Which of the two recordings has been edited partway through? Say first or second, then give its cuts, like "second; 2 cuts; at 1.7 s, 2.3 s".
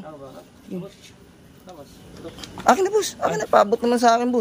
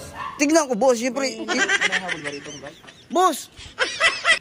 second; 1 cut; at 2.9 s